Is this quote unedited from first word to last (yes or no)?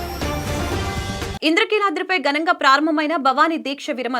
no